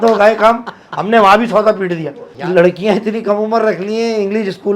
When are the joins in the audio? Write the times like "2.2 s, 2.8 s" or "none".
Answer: 2.4 s